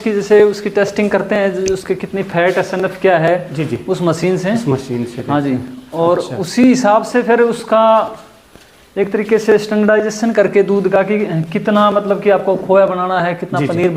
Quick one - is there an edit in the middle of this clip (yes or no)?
no